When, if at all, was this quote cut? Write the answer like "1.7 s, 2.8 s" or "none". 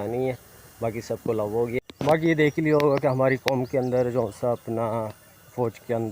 1.8 s